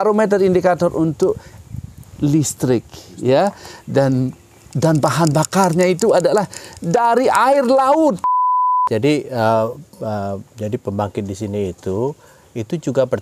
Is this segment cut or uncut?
cut